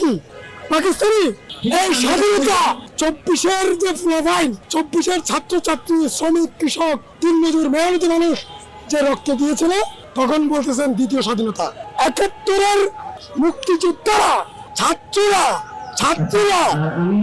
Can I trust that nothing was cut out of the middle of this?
no; 3 cuts; at 1.5 s, 2.9 s, 4.6 s

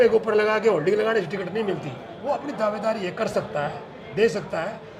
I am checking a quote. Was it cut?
no; 0 cuts

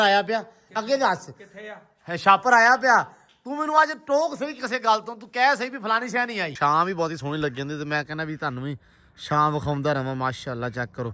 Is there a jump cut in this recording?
yes; 1 cut; at 6.5 s

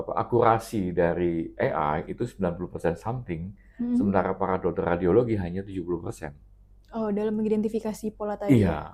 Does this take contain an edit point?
no; 0 cuts

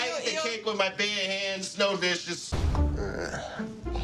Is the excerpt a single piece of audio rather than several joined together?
no; 1 cut; at 2.5 s

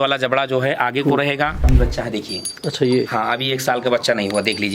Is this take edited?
yes; 1 cut; at 1.7 s

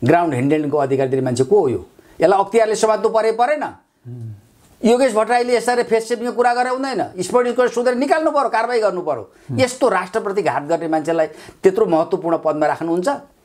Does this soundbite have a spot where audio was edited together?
no; 0 cuts

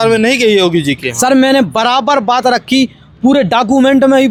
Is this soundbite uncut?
yes; 0 cuts

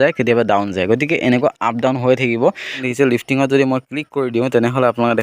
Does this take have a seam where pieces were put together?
yes; 1 cut; at 2.8 s

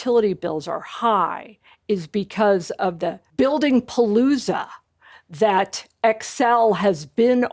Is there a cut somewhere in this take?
yes; 1 cut; at 3.2 s

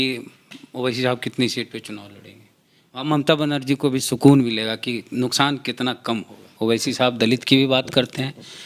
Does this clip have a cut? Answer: yes; 1 cut; at 6.5 s

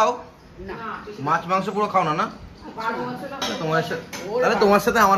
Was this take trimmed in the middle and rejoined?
no; 0 cuts

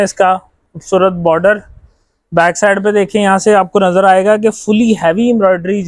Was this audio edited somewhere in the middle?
no; 0 cuts

